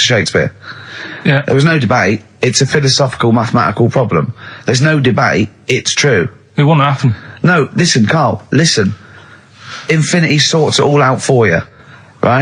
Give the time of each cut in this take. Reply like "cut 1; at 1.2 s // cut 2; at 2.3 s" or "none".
none